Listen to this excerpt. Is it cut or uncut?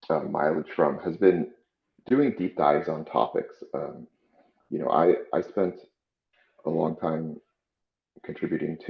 uncut